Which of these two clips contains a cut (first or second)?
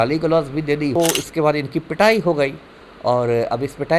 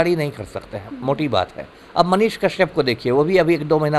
first